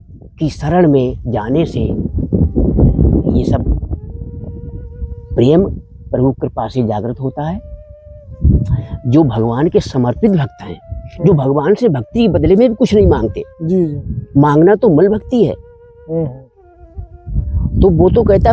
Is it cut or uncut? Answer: uncut